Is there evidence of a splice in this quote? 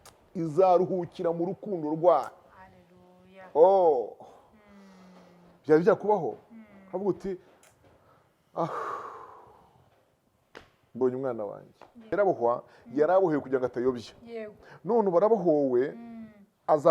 yes; 1 cut; at 12.1 s

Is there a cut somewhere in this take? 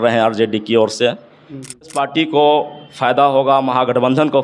yes; 1 cut; at 2.0 s

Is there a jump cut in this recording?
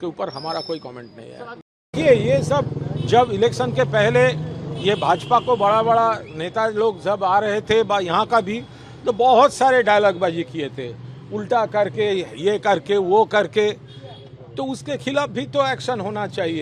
yes; 1 cut; at 1.8 s

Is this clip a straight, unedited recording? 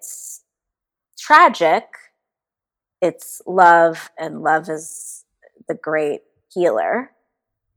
no; 1 cut; at 6.3 s

